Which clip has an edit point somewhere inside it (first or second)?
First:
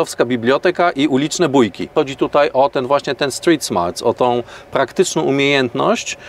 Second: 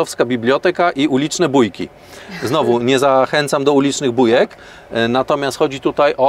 first